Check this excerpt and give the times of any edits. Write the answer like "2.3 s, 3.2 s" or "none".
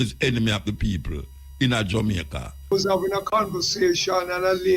2.7 s